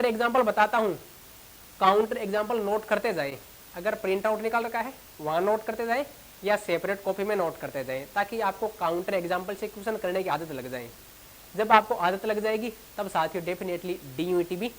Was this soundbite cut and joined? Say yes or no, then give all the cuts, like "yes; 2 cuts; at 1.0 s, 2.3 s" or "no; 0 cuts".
no; 0 cuts